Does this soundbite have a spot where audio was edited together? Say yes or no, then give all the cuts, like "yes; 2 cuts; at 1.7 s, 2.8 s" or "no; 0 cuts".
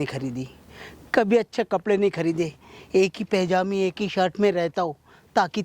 no; 0 cuts